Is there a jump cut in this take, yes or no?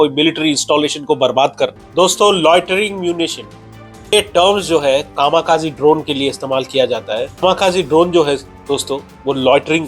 yes